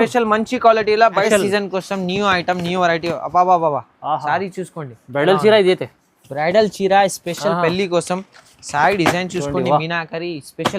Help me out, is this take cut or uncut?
cut